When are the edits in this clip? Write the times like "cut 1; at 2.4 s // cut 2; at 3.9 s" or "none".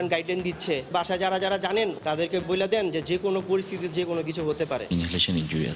cut 1; at 0.9 s // cut 2; at 2.4 s // cut 3; at 4.9 s